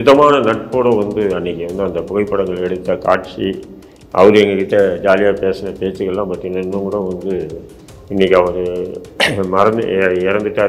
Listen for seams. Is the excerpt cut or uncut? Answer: uncut